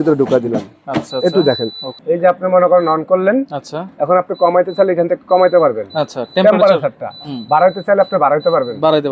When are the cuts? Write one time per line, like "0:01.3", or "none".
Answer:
0:01.9